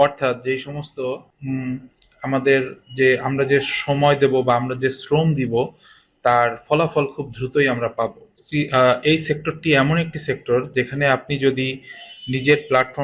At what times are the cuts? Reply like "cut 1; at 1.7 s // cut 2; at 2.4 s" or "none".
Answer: cut 1; at 1.3 s // cut 2; at 8.4 s